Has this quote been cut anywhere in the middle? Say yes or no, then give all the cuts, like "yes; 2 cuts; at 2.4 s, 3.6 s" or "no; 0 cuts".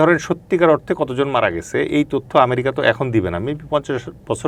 no; 0 cuts